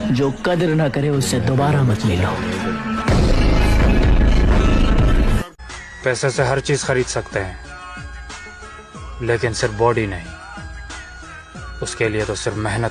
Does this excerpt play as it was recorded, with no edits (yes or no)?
no